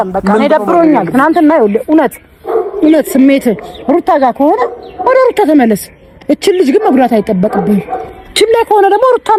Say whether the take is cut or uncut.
uncut